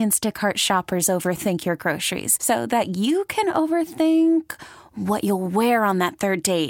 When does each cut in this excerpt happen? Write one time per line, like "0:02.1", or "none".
none